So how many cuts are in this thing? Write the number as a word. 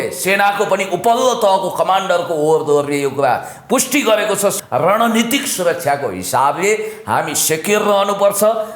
one